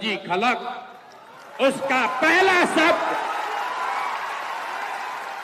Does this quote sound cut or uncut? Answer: uncut